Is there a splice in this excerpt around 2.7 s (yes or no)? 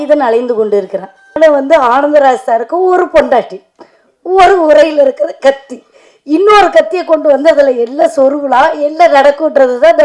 no